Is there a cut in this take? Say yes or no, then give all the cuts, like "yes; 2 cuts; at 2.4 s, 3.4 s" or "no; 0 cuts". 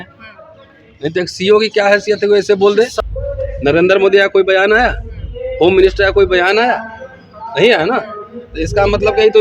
yes; 1 cut; at 2.9 s